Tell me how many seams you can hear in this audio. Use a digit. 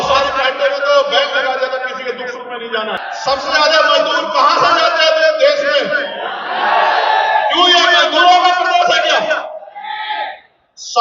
1